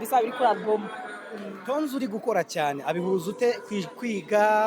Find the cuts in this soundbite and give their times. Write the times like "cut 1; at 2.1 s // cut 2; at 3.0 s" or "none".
none